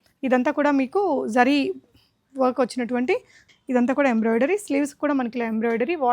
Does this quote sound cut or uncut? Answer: cut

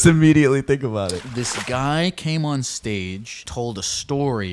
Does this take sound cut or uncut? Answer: cut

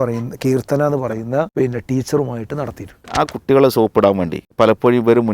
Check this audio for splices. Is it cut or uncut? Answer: cut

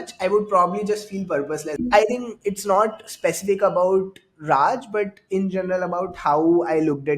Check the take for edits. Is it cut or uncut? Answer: cut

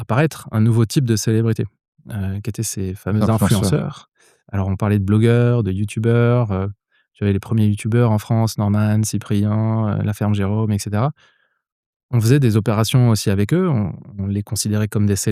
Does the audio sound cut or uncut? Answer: uncut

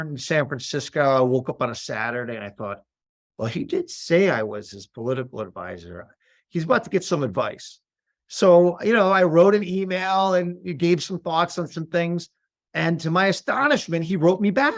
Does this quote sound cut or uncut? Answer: uncut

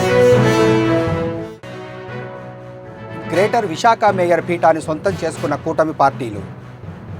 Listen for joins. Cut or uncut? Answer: cut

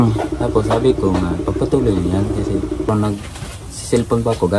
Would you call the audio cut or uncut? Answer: cut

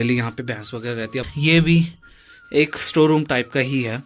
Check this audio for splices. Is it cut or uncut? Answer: cut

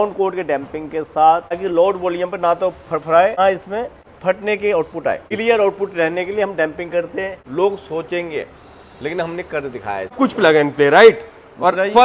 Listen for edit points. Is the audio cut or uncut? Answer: cut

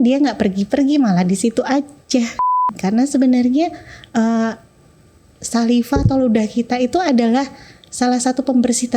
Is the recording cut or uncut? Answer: cut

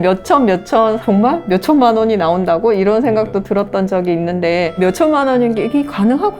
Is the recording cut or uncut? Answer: cut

